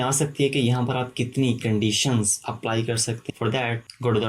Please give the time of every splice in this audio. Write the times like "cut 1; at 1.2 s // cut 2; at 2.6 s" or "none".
cut 1; at 3.2 s